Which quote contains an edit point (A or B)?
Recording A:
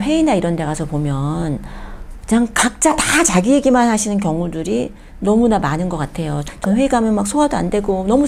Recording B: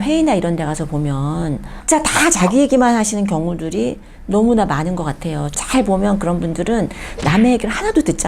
B